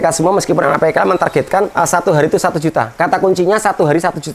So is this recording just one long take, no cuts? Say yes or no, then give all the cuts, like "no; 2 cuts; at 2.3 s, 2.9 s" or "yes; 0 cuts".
no; 2 cuts; at 1.7 s, 2.9 s